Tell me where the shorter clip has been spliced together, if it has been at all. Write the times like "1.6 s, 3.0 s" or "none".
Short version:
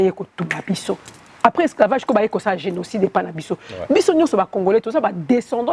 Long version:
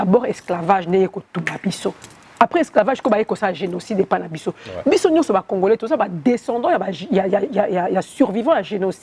none

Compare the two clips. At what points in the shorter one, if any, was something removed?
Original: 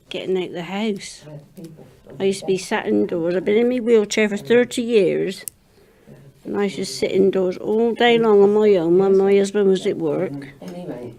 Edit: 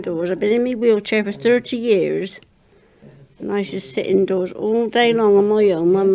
none

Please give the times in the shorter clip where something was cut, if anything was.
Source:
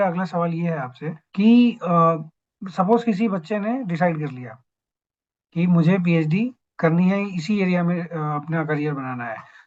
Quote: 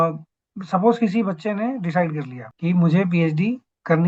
2.4 s

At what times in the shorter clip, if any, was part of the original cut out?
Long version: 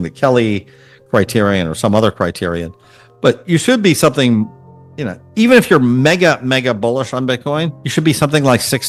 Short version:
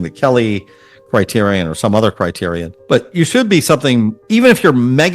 2.7 s, 4.2 s

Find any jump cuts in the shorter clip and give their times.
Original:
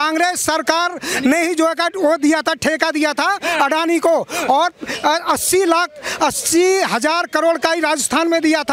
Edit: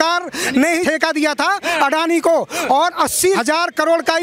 0.8 s, 3.2 s

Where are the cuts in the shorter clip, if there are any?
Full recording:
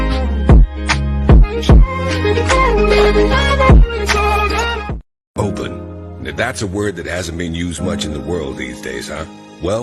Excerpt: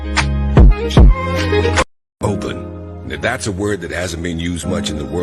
1.8 s

